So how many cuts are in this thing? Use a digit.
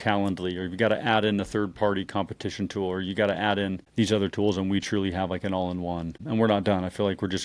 2